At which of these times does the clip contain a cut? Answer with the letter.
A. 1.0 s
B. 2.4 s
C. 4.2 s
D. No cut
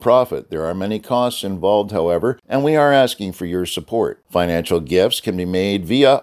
B